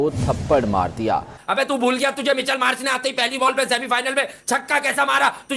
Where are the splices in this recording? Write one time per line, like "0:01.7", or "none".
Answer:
0:01.3

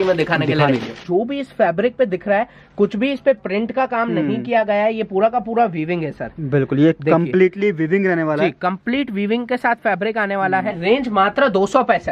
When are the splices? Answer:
0:01.0
0:10.8

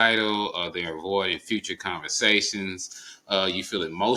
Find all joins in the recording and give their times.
none

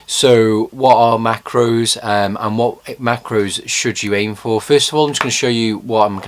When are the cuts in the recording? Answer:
none

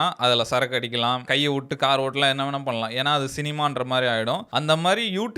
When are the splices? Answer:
0:01.2
0:04.5

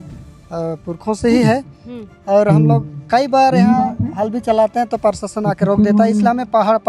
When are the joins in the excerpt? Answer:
none

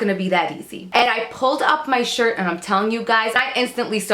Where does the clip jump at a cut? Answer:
0:01.1
0:03.4

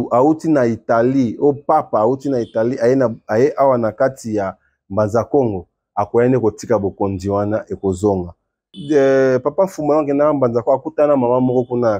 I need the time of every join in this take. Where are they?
0:08.7

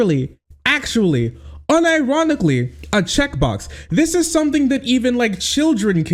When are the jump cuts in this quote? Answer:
none

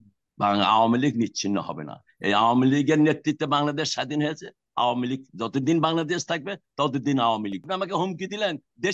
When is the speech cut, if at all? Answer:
0:07.6

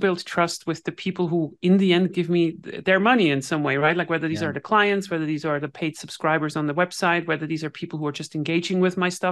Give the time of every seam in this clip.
none

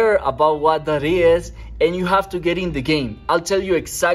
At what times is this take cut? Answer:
none

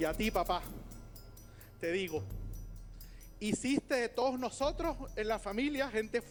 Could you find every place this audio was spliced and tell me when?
none

